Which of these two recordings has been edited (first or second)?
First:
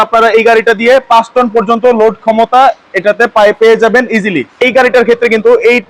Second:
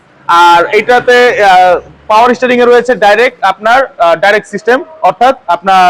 first